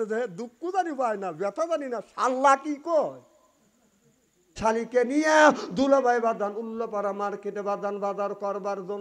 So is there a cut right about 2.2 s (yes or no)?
no